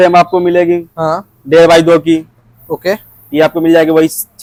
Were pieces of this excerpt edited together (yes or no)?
no